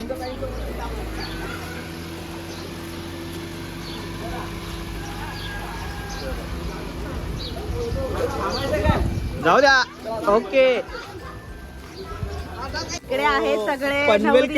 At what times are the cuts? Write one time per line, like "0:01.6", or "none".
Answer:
0:13.0